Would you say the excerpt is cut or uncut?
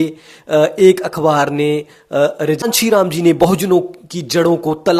cut